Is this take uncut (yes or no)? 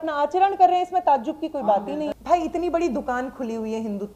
no